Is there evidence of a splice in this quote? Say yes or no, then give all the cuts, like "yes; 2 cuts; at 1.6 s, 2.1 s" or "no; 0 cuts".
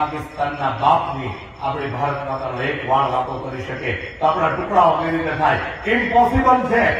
no; 0 cuts